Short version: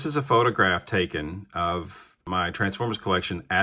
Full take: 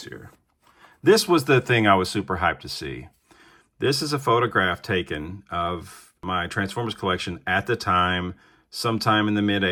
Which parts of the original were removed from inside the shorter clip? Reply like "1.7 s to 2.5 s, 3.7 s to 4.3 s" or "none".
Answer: none